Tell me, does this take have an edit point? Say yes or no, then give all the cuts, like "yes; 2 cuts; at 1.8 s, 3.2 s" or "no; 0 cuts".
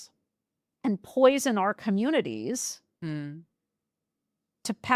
no; 0 cuts